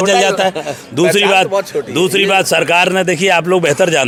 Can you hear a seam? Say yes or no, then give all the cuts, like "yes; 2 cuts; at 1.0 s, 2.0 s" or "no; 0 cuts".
no; 0 cuts